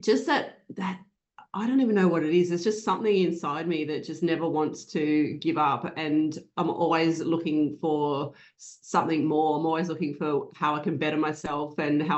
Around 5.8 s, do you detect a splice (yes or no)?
no